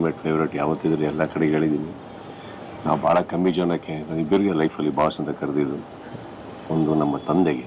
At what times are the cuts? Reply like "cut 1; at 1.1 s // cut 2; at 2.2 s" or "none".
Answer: none